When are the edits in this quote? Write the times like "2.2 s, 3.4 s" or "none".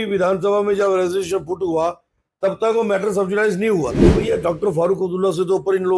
4.1 s